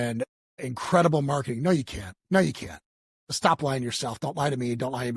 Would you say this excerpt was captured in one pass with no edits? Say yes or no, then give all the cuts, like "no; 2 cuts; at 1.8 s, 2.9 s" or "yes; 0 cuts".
yes; 0 cuts